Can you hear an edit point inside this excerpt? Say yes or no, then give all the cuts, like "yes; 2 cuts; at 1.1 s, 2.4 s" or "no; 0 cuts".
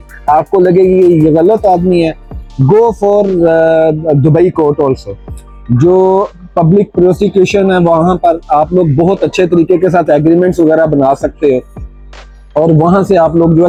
no; 0 cuts